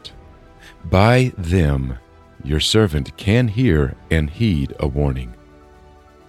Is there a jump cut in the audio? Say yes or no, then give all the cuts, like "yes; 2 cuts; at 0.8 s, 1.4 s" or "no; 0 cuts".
yes; 1 cut; at 5.3 s